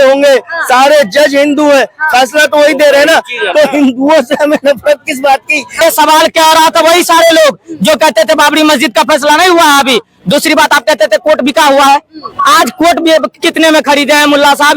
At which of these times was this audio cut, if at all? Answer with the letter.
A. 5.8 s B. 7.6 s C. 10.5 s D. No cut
A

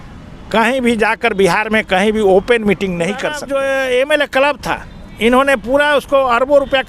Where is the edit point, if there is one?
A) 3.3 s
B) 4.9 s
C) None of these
A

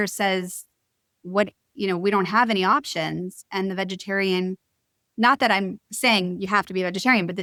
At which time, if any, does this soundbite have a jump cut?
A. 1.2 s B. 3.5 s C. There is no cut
C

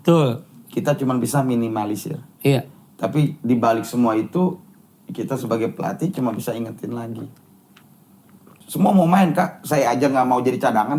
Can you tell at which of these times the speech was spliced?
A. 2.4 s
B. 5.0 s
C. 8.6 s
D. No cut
C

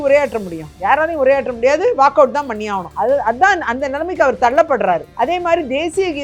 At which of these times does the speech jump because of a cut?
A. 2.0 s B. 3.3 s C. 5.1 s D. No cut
D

